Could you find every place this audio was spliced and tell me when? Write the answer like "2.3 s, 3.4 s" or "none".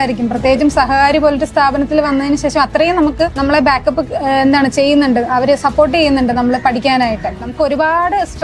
7.5 s